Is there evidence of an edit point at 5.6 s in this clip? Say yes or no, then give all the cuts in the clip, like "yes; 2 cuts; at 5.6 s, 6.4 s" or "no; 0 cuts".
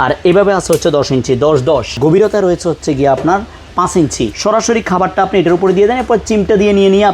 no; 2 cuts; at 2.0 s, 4.3 s